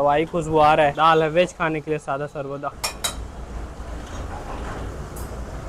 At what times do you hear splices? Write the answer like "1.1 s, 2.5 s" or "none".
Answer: 0.9 s, 2.8 s